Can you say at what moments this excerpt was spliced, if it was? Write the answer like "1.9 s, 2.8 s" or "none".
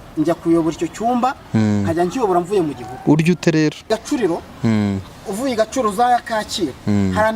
3.8 s

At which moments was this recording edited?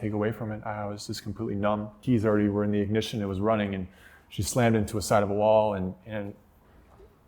1.9 s

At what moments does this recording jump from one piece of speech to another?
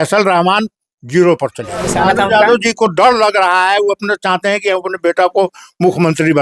1.9 s

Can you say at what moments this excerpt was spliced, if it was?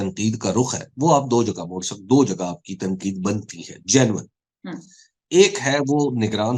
none

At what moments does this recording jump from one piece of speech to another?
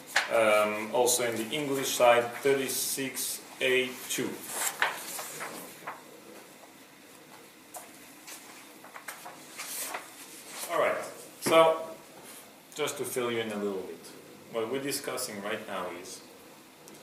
none

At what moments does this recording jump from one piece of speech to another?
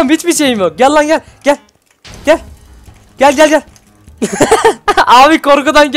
none

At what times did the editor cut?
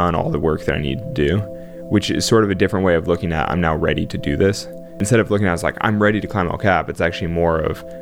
5.0 s

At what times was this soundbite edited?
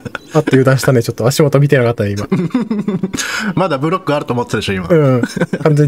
none

